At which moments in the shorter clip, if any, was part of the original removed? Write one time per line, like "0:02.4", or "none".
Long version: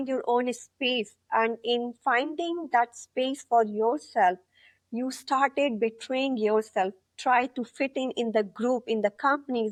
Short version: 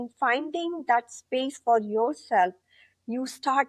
none

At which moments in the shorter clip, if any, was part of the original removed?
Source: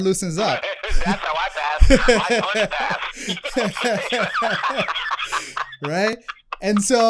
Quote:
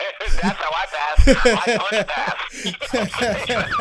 none

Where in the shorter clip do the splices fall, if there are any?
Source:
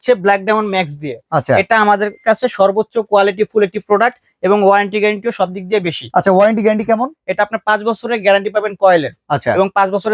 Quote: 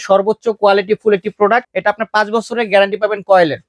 0:01.7

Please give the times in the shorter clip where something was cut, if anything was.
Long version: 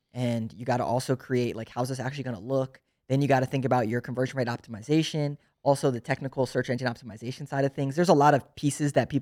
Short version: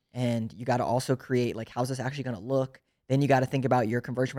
none

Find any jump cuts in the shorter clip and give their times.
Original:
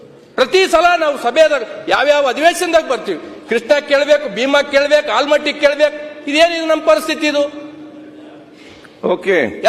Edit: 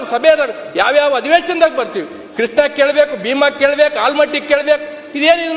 none

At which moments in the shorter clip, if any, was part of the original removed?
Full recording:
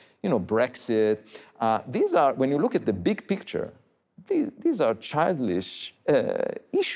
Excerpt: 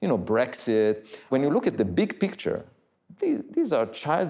0:01.3

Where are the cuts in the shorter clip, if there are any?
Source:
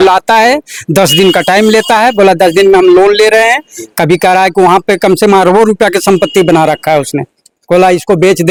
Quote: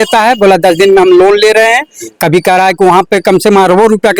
none

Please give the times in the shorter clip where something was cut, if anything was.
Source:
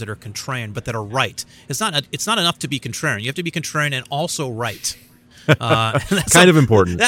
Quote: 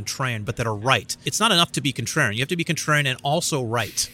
0:01.3

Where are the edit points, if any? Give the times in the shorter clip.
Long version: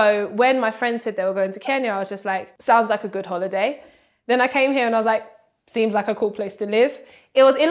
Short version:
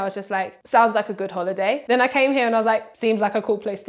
0:01.8
0:02.9

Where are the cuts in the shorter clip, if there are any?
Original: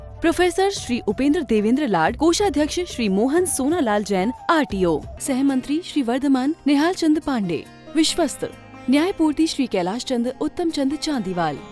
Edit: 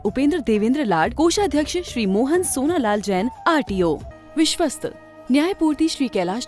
0:04.1

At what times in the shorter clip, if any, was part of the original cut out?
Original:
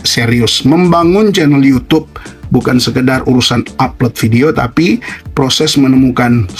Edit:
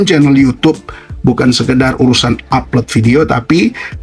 none

